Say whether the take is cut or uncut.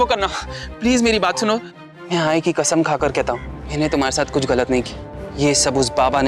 cut